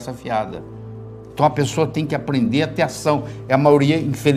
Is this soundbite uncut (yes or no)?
yes